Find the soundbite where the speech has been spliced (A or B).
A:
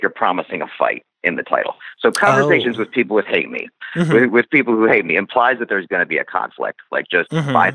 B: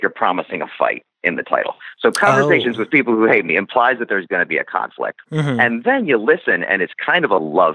B